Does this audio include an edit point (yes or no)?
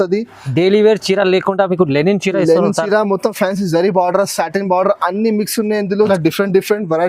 yes